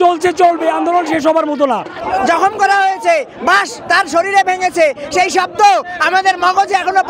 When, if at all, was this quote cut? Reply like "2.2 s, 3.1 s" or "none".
2.0 s